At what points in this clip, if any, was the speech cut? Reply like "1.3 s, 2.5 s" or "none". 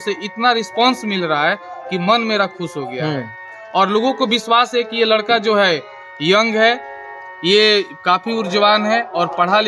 none

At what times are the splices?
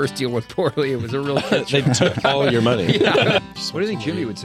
3.4 s

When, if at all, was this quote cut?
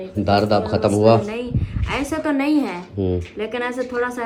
none

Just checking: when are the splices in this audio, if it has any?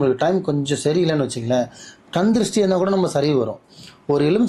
none

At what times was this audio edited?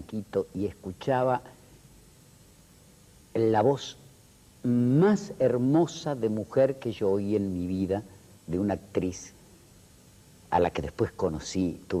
none

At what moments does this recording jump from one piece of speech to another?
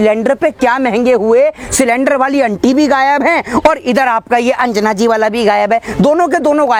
none

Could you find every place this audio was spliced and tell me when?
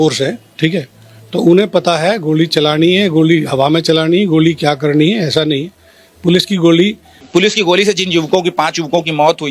7.1 s

